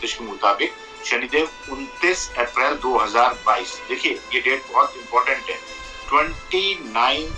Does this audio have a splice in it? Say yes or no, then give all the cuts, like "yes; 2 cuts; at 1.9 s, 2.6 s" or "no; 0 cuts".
yes; 1 cut; at 4.3 s